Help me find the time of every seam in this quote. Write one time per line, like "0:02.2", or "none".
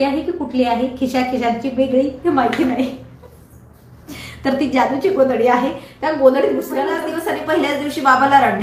0:07.0